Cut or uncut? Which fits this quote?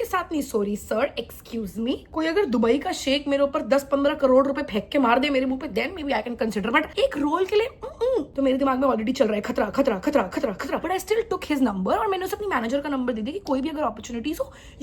uncut